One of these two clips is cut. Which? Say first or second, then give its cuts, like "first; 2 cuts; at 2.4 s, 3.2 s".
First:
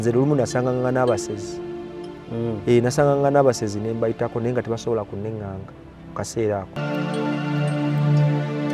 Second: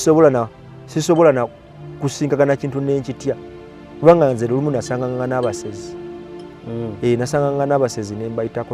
first; 1 cut; at 6.7 s